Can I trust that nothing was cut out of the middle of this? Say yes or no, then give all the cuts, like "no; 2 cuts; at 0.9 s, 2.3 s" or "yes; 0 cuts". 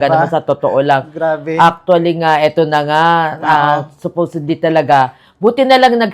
yes; 0 cuts